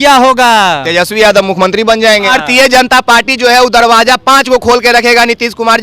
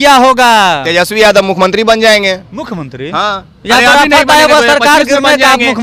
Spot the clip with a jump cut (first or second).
first